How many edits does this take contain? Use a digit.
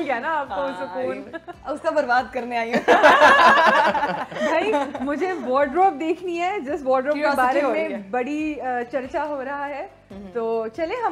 0